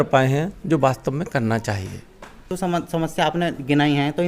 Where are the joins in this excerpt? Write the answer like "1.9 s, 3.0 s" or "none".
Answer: 2.5 s